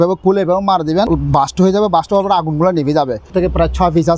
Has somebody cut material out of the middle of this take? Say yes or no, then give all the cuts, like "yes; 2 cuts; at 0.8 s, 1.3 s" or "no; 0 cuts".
yes; 2 cuts; at 1.1 s, 3.3 s